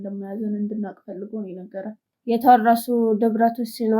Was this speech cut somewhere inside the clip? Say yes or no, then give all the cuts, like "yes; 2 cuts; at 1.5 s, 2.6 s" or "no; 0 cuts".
yes; 1 cut; at 2.1 s